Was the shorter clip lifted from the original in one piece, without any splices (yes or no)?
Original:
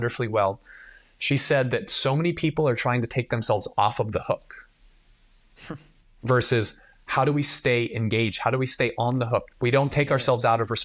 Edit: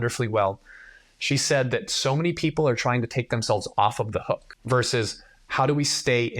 no